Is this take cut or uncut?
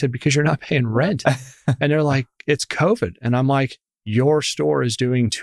uncut